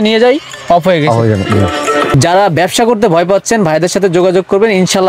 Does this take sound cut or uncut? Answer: cut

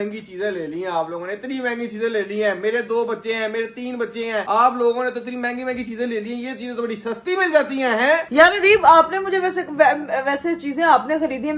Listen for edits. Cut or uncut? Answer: uncut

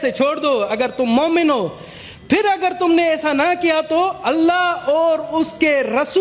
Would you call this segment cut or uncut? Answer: uncut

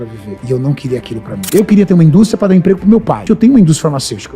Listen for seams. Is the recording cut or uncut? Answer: cut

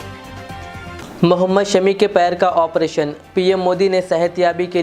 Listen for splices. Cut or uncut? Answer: cut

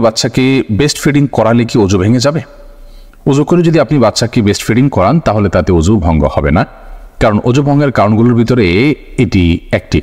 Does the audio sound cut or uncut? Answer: uncut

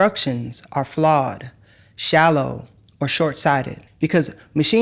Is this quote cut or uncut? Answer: cut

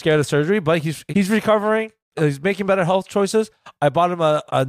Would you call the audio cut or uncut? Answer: cut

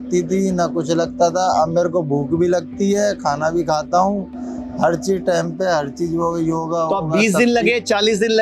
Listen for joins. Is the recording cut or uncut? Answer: uncut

